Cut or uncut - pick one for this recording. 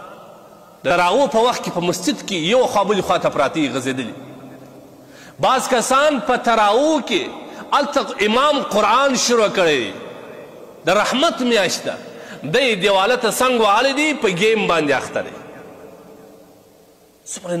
cut